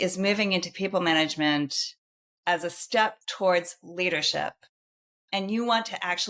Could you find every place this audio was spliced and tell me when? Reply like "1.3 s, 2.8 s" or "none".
none